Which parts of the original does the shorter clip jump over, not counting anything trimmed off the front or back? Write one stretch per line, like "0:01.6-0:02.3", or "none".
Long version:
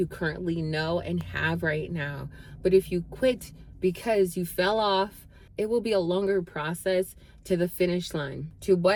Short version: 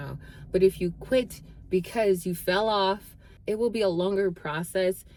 none